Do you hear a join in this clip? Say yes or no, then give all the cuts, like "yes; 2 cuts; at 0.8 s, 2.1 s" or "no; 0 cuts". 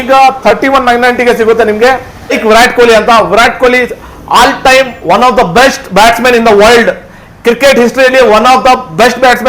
yes; 1 cut; at 2.4 s